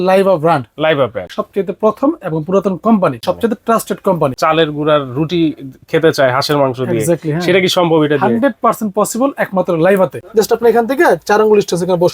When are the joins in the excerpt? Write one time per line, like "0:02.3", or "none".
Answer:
0:01.4
0:03.2
0:04.4
0:10.2